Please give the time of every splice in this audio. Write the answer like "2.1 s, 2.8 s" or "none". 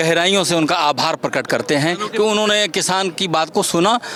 none